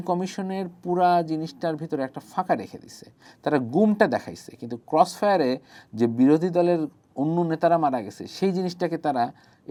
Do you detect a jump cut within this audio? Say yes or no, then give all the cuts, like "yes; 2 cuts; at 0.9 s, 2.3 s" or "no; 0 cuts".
no; 0 cuts